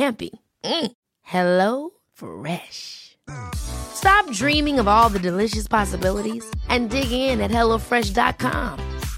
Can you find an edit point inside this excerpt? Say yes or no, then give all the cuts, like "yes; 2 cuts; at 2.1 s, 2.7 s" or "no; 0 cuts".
no; 0 cuts